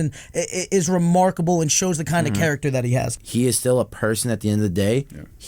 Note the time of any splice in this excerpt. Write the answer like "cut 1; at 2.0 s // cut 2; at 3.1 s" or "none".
cut 1; at 3.2 s